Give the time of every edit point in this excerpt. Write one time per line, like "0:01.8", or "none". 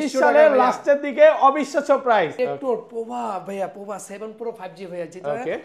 0:02.3